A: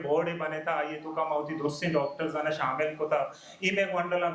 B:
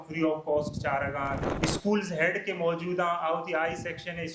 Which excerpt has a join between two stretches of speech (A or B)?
B